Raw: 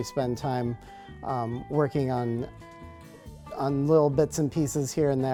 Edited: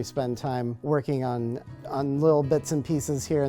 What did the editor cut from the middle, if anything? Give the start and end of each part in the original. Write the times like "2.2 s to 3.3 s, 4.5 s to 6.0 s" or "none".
0.8 s to 1.6 s, 2.6 s to 3.4 s